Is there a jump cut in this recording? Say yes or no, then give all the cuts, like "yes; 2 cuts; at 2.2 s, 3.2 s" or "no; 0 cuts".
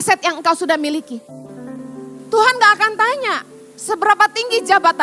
yes; 1 cut; at 1.7 s